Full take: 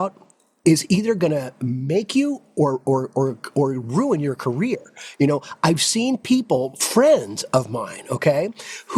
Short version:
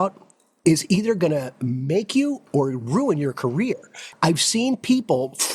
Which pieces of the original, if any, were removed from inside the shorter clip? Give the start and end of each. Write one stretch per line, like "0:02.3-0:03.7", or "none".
0:02.4-0:03.4
0:05.1-0:05.5